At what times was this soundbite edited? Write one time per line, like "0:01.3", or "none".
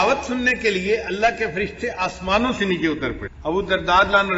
0:03.3